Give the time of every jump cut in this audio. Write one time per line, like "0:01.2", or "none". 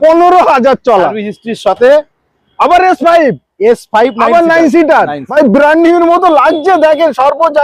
0:05.3